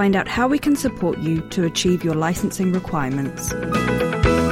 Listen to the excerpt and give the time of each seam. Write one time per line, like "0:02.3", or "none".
0:03.5